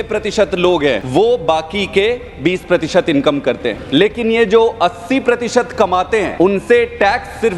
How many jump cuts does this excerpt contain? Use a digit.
3